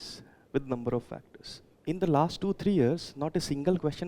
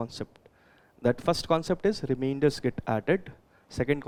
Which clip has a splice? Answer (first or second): first